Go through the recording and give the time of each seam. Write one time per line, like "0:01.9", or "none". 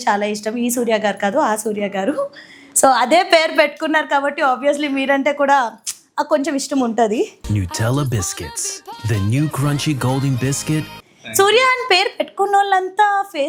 none